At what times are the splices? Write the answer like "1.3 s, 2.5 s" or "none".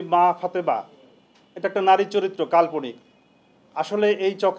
none